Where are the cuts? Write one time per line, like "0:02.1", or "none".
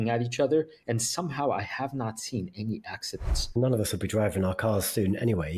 0:03.5